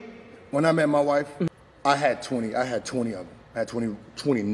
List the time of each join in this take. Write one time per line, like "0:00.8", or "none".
0:01.5